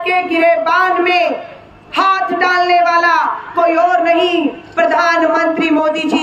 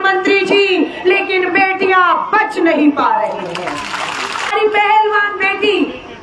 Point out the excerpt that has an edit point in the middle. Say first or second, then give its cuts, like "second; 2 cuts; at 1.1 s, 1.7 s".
second; 1 cut; at 4.5 s